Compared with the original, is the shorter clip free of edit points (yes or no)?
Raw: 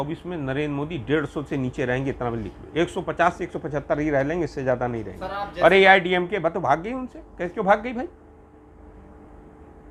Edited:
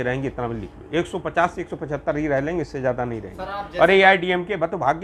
yes